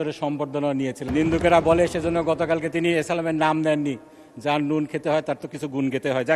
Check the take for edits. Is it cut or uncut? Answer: cut